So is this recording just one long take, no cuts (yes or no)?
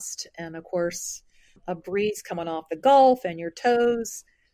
no